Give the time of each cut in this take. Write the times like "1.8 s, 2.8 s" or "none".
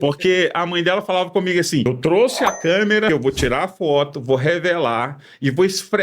1.9 s, 3.1 s